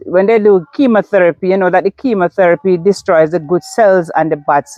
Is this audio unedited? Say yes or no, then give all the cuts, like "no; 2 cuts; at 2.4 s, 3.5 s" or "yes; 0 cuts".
yes; 0 cuts